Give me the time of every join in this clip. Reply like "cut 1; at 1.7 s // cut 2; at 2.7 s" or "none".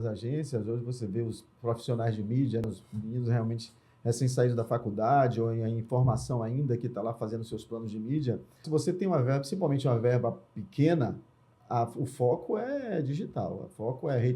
cut 1; at 2.6 s // cut 2; at 8.6 s

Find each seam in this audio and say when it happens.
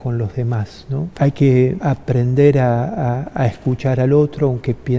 cut 1; at 1.1 s // cut 2; at 1.8 s

